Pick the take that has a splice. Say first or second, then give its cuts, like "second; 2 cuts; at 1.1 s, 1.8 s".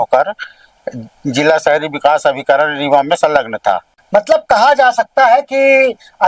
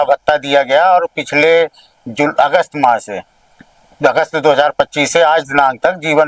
first; 1 cut; at 3.9 s